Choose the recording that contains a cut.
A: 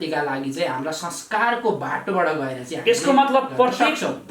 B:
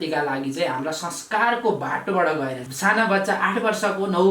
B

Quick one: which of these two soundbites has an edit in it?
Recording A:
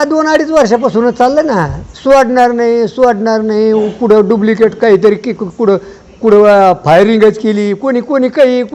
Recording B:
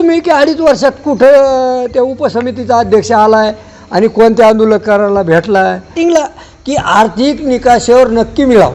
B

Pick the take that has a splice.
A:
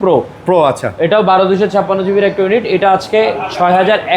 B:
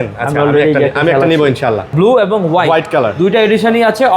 B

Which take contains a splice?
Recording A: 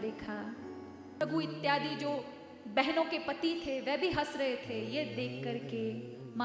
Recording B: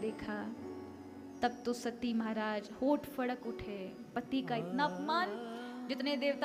A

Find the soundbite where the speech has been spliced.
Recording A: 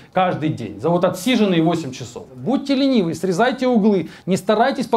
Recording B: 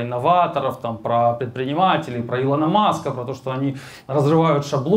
A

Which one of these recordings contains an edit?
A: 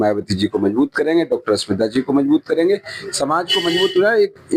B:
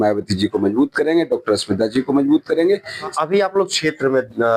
B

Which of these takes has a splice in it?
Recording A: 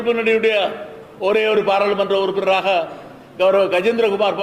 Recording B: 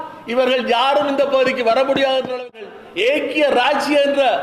B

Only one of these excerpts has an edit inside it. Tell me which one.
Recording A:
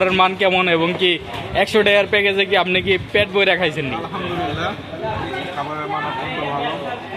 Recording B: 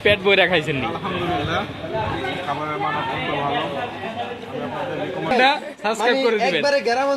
B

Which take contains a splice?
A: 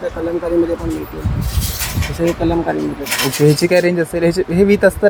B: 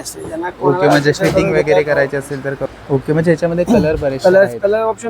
B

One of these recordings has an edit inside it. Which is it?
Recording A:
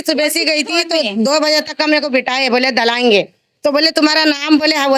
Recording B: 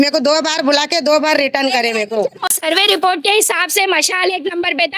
B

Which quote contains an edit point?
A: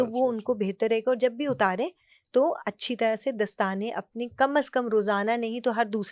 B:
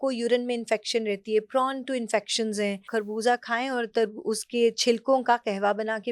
B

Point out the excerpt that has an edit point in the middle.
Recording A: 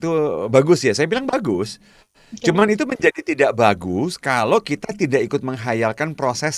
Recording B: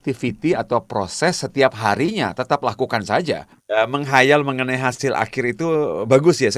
B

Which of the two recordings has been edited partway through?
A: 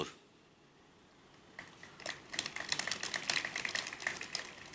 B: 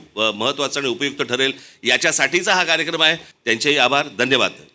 B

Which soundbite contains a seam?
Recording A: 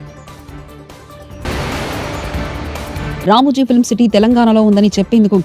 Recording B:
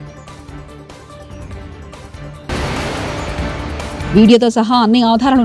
A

